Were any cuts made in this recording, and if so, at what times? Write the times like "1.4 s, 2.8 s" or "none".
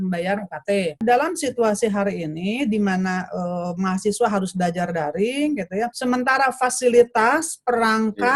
1.0 s